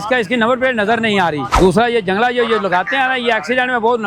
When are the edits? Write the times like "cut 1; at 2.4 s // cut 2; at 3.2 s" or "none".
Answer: cut 1; at 1.5 s